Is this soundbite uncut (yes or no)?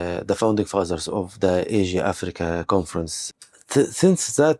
no